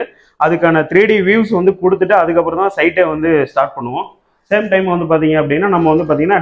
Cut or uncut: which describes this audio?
uncut